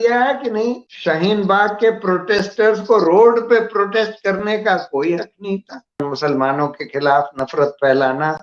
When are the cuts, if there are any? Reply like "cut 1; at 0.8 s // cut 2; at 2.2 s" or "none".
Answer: cut 1; at 0.9 s // cut 2; at 6.0 s